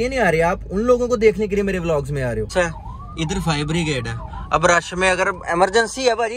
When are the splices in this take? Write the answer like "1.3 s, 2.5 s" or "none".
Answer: 2.5 s